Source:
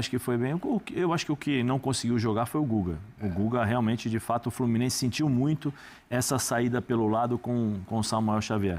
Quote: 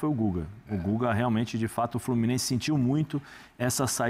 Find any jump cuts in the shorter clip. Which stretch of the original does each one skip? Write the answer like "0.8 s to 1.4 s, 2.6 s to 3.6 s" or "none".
none